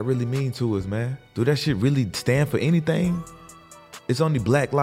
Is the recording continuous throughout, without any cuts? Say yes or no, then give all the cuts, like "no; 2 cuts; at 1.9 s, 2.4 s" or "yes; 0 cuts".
no; 1 cut; at 1.2 s